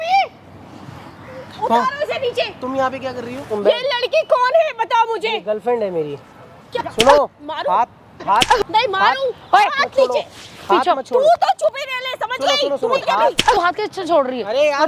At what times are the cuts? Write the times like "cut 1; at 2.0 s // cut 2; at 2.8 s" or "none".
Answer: cut 1; at 3.5 s // cut 2; at 6.6 s // cut 3; at 13.0 s